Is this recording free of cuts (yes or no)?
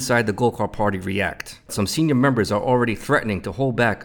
no